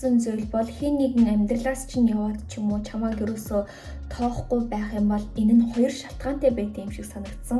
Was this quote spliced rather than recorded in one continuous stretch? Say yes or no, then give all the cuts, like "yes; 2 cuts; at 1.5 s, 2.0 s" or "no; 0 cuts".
no; 0 cuts